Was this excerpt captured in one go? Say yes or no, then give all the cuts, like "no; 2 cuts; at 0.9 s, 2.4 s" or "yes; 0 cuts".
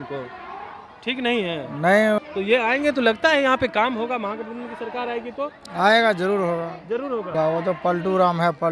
no; 2 cuts; at 2.2 s, 7.3 s